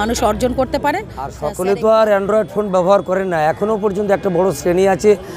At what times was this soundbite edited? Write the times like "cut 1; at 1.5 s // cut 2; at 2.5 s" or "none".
cut 1; at 1.4 s